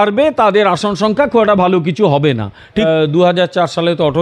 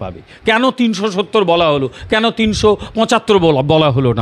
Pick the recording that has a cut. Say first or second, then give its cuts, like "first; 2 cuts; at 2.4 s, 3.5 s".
first; 1 cut; at 2.8 s